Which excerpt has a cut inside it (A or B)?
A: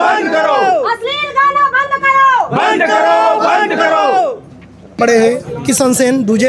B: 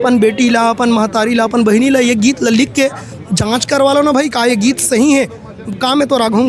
A